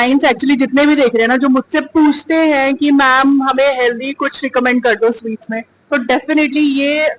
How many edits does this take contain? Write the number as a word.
zero